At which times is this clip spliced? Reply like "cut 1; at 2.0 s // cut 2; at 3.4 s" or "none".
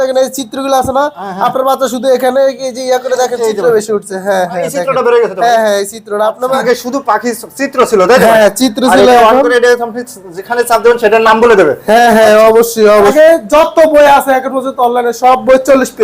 cut 1; at 6.6 s // cut 2; at 13.1 s